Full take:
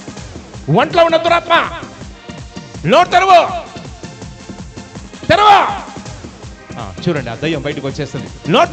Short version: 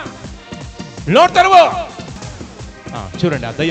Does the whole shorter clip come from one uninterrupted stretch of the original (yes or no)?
no